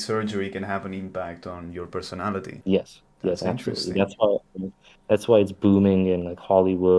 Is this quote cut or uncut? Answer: cut